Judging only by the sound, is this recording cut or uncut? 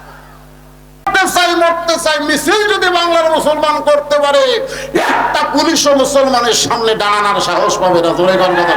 cut